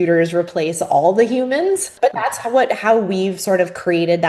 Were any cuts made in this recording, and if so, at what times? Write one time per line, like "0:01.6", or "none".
0:01.9